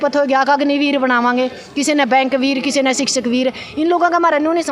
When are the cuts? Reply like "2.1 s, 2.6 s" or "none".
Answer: none